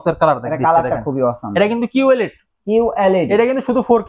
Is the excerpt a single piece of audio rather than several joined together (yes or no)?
yes